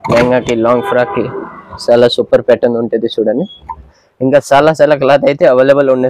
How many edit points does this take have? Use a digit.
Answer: 1